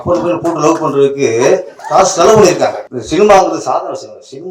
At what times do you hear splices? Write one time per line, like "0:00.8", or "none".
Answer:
0:01.7
0:02.9